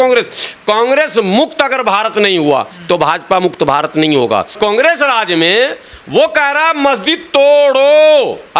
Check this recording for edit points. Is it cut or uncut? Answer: cut